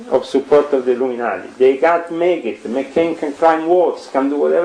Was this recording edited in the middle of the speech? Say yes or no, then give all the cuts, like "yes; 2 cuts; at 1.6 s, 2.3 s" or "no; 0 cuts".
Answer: no; 0 cuts